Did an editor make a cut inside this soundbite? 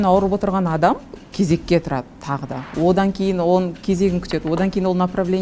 yes; 1 cut; at 1.2 s

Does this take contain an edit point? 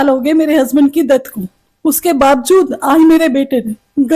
no; 0 cuts

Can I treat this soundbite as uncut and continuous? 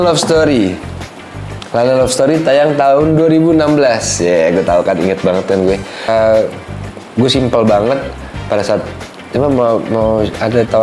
no; 1 cut; at 6.1 s

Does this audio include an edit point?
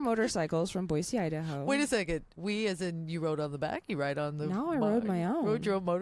no; 0 cuts

